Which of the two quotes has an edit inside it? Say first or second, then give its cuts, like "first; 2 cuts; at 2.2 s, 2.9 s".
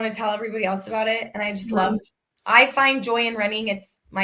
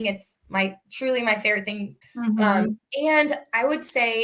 second; 1 cut; at 1.9 s